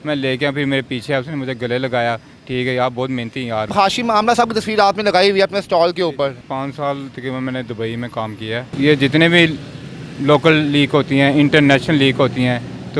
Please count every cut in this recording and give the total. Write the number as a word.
three